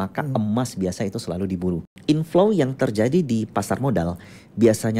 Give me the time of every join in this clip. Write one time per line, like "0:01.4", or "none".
0:01.9